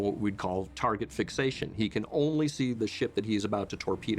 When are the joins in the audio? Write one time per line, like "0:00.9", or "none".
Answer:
0:02.8